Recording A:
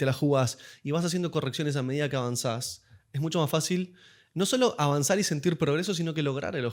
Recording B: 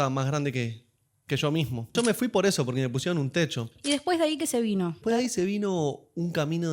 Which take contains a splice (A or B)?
B